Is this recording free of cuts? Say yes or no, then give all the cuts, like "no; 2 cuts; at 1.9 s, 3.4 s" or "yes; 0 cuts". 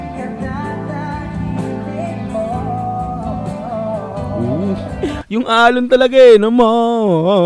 yes; 0 cuts